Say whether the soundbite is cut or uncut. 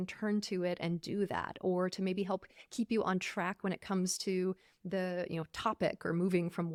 uncut